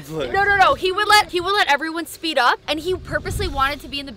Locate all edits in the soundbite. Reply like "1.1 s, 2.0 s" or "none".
1.3 s, 2.6 s